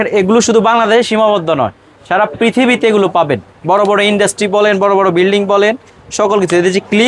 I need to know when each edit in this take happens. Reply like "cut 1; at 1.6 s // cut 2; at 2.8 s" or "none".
none